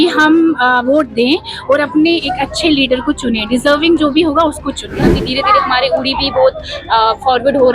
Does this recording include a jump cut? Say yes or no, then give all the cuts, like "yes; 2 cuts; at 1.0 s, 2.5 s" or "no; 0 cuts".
yes; 1 cut; at 5.2 s